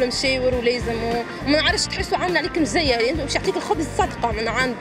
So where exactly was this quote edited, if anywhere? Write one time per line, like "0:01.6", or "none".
none